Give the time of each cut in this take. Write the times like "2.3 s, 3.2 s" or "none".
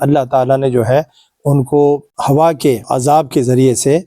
none

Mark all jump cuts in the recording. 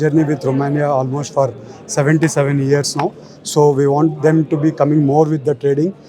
none

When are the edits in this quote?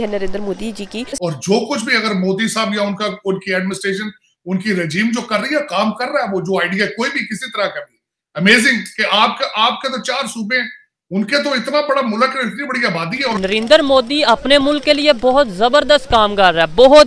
1.1 s, 13.3 s

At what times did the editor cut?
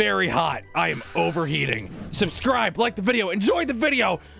1.8 s

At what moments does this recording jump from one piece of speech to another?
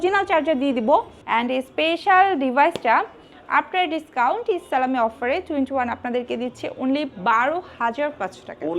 1.2 s

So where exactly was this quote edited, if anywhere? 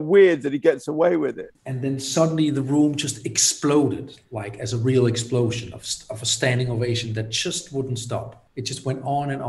1.5 s, 8.4 s

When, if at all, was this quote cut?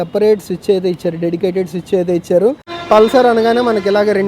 2.7 s

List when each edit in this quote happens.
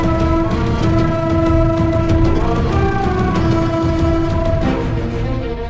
2.3 s

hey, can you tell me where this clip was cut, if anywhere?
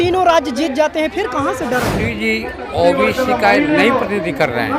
2.0 s

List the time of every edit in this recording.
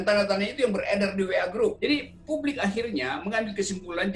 1.8 s

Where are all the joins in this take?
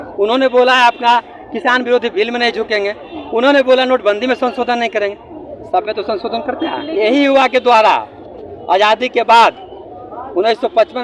6.8 s

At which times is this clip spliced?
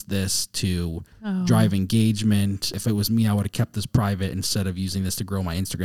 2.8 s

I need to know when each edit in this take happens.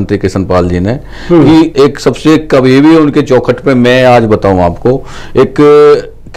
none

